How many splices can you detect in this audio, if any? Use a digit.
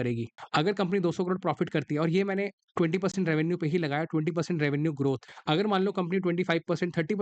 0